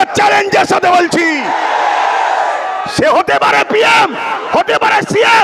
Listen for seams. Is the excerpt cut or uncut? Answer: uncut